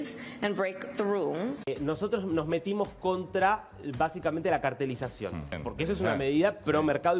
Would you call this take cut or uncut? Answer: cut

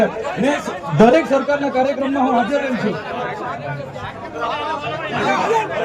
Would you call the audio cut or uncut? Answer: uncut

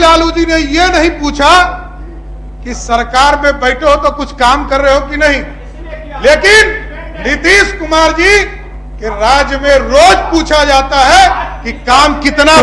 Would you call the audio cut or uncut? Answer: uncut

